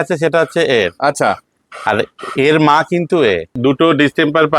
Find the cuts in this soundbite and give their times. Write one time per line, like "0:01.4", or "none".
0:03.5